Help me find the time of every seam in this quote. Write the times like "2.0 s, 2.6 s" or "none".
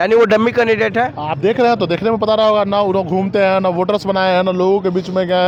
none